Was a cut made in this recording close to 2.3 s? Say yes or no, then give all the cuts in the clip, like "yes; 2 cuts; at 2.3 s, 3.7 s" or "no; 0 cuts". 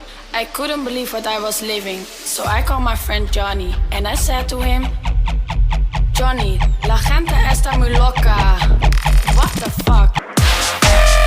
no; 1 cut; at 10.3 s